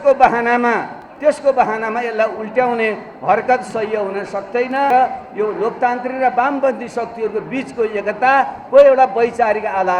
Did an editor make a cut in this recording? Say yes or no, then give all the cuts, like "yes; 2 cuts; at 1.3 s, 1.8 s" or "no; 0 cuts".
yes; 1 cut; at 4.9 s